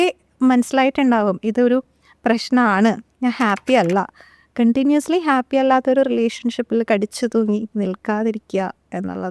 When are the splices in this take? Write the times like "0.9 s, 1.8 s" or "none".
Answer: none